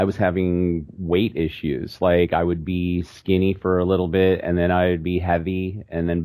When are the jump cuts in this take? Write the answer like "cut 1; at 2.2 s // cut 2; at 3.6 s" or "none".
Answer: none